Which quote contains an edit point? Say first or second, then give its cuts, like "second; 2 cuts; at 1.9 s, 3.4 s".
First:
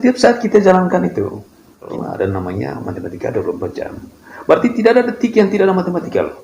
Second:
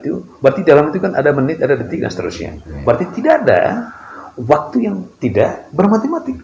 first; 1 cut; at 1.9 s